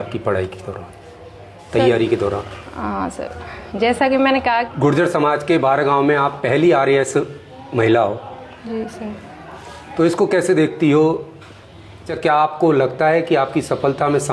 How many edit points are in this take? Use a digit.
2